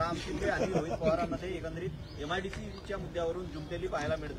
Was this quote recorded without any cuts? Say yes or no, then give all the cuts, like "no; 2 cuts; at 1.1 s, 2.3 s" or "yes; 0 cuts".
yes; 0 cuts